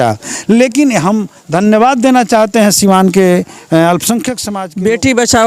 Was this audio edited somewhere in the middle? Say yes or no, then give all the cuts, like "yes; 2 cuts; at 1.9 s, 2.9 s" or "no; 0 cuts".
yes; 1 cut; at 4.4 s